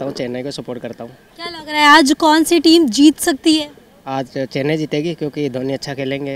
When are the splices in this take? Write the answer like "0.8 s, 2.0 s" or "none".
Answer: none